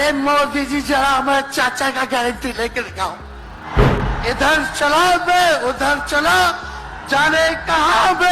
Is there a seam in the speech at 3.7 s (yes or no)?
yes